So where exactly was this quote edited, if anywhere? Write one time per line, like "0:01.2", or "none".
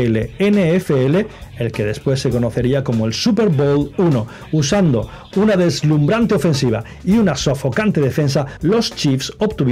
none